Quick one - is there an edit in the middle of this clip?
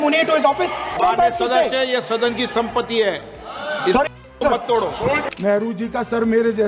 yes; 2 cuts; at 1.0 s, 5.2 s

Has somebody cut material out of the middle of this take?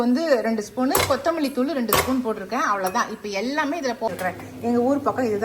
yes; 1 cut; at 4.1 s

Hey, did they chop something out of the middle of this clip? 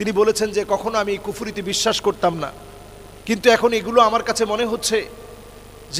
no; 0 cuts

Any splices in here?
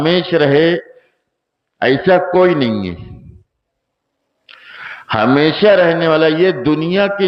no; 0 cuts

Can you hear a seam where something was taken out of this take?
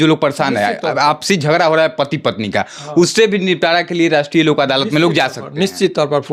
no; 0 cuts

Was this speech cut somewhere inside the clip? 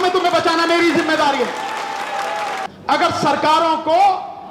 yes; 1 cut; at 2.6 s

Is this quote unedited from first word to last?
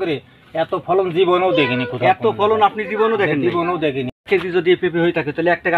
no; 1 cut; at 4.1 s

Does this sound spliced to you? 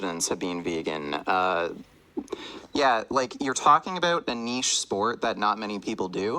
yes; 1 cut; at 5.2 s

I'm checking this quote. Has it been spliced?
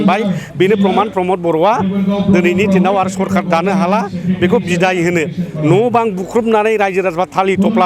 no; 0 cuts

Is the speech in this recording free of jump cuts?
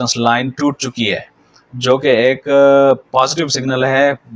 yes; 0 cuts

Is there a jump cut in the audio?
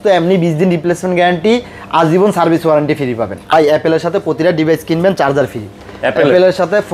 yes; 1 cut; at 3.5 s

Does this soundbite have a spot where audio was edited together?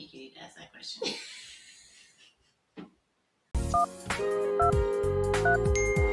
no; 0 cuts

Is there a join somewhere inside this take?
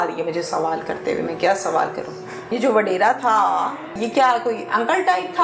yes; 2 cuts; at 2.5 s, 4.0 s

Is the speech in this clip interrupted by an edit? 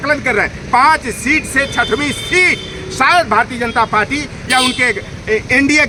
no; 0 cuts

